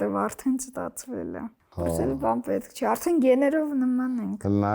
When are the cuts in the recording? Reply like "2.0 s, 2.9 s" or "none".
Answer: 1.6 s